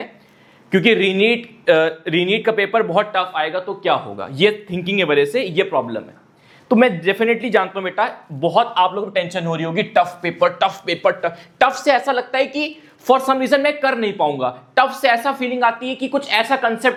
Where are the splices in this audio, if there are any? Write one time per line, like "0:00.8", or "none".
none